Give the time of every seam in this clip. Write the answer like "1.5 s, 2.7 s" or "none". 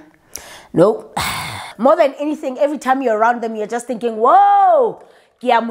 1.6 s